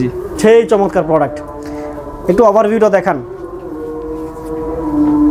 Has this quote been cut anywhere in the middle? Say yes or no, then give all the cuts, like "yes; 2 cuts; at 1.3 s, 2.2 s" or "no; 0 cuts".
no; 0 cuts